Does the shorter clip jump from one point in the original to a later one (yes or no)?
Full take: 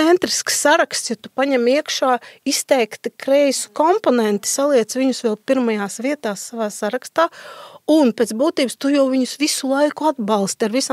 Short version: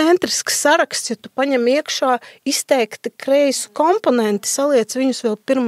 no